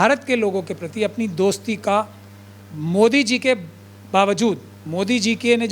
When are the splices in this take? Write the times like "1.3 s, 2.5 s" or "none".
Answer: none